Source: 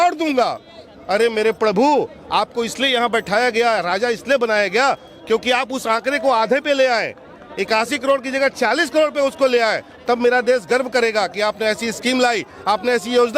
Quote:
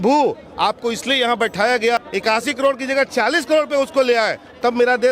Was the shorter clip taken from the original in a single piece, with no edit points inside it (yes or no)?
no